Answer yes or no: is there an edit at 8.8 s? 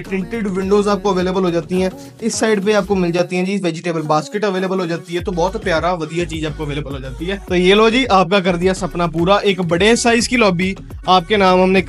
no